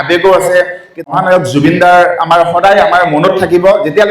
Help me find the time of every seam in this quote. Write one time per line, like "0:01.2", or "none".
0:01.1